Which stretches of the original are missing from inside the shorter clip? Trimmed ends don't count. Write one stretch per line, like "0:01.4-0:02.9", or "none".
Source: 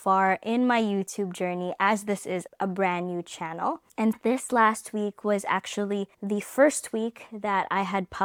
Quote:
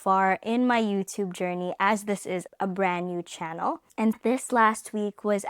none